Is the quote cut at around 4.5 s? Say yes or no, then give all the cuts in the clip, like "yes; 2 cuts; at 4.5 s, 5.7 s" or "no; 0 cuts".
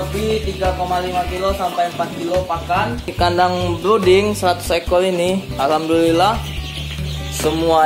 no; 1 cut; at 3.1 s